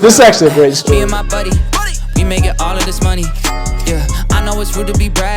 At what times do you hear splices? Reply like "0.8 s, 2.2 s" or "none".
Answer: 1.1 s